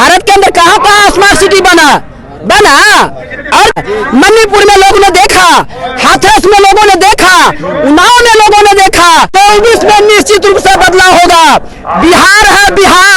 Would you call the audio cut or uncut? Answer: cut